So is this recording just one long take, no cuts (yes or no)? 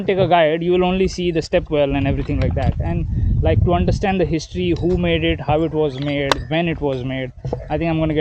yes